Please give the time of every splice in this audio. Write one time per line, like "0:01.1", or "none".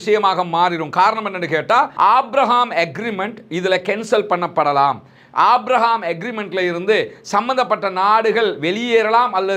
0:01.9